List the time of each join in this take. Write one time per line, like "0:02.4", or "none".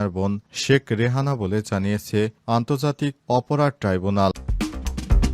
0:04.4

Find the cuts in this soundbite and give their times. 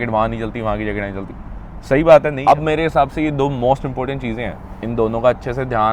0:02.4

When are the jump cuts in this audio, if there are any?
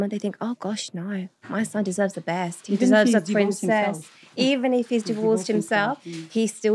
none

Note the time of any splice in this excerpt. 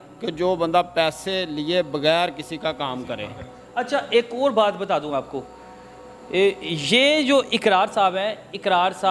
none

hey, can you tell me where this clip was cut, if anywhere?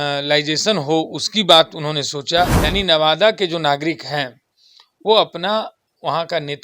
0:02.6

